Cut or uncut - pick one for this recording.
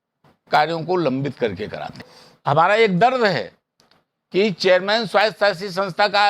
cut